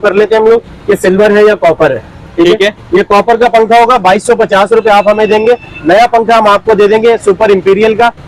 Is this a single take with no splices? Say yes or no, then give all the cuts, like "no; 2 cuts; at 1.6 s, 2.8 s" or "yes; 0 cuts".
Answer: yes; 0 cuts